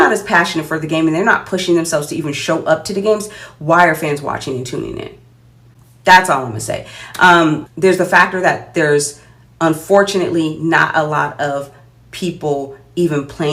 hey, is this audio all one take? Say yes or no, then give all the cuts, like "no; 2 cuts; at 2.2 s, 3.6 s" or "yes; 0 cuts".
yes; 0 cuts